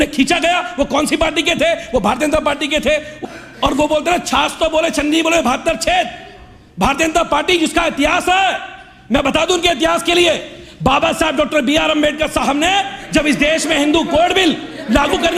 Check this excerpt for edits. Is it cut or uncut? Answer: cut